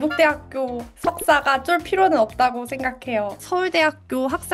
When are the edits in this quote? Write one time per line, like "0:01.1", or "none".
0:03.3